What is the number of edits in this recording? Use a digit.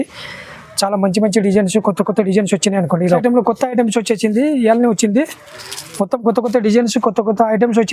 1